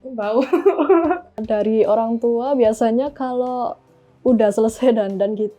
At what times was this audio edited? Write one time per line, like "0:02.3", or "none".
0:01.3